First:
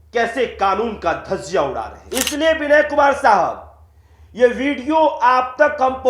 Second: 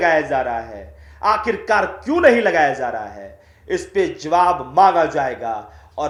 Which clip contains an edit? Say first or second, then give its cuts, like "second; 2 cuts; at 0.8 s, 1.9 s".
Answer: first; 1 cut; at 2.0 s